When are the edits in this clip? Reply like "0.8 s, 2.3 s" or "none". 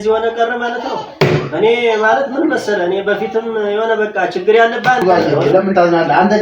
5.0 s